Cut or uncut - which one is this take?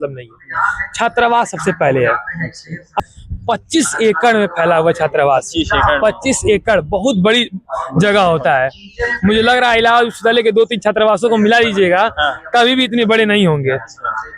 cut